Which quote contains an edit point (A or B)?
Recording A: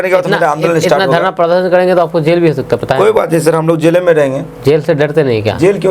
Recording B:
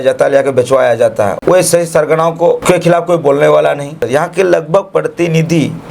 B